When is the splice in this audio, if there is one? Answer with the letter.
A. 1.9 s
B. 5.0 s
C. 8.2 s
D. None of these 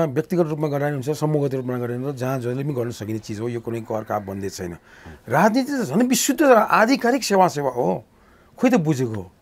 D